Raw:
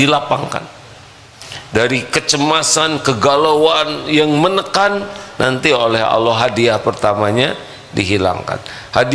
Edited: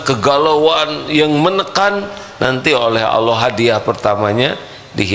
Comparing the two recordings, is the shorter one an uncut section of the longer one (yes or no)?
yes